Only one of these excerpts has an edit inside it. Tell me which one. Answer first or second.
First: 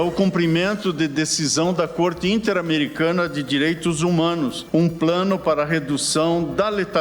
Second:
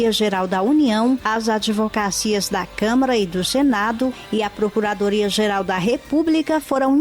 first